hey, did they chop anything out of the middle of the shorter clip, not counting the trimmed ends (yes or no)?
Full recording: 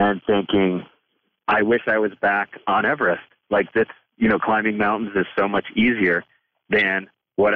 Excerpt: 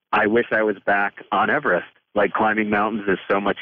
yes